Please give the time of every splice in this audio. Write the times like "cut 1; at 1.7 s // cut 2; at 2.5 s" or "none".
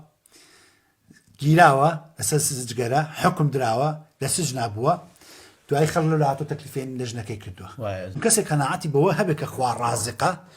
cut 1; at 8.1 s